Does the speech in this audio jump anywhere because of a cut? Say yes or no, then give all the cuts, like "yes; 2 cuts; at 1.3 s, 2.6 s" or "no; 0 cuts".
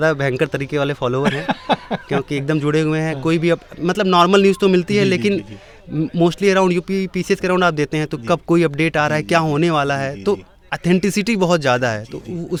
no; 0 cuts